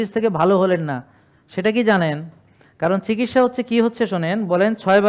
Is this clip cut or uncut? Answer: uncut